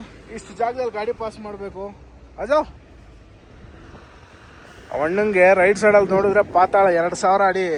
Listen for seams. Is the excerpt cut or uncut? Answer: uncut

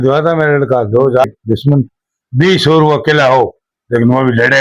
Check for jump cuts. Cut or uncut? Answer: cut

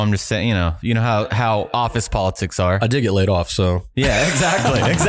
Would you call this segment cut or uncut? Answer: uncut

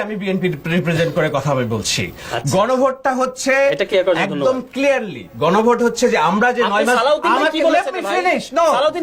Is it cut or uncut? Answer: uncut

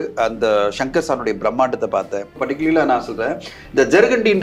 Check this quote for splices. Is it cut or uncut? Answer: cut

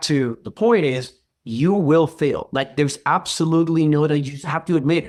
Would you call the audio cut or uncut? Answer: uncut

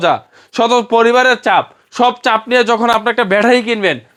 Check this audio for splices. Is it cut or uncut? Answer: uncut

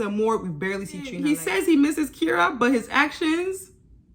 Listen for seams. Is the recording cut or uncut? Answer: cut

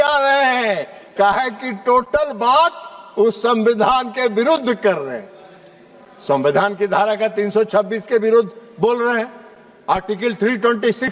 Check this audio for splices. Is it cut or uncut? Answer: uncut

